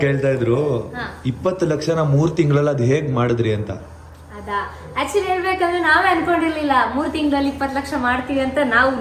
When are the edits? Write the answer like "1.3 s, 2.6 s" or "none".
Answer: none